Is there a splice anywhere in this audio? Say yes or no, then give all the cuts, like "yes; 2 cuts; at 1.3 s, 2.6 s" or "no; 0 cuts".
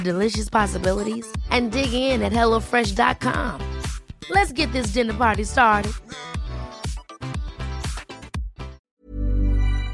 yes; 1 cut; at 8.8 s